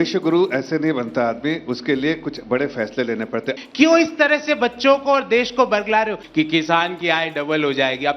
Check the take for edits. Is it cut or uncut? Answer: cut